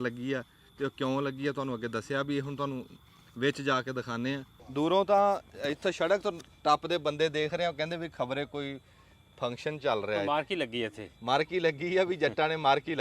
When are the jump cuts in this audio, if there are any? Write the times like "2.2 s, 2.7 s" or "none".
4.6 s